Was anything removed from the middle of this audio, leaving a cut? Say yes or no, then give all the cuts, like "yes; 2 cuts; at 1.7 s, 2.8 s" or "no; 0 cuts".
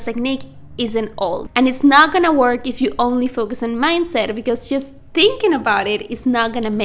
yes; 1 cut; at 1.6 s